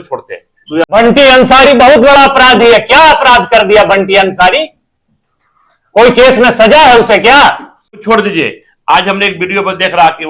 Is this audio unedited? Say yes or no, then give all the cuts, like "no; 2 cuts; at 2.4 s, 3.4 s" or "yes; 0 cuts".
no; 2 cuts; at 0.8 s, 8.0 s